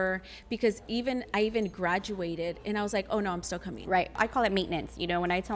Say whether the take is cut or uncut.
cut